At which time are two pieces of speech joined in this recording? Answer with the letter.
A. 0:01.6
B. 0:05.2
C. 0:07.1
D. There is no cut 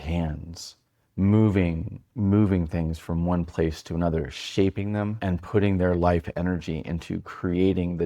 B